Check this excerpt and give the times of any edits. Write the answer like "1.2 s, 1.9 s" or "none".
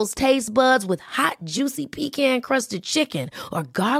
none